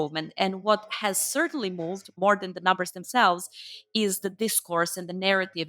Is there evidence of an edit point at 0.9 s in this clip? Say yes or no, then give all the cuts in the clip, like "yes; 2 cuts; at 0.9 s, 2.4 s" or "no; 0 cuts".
no; 1 cut; at 2.2 s